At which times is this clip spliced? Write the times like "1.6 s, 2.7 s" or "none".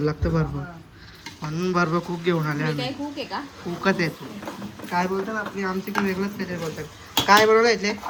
none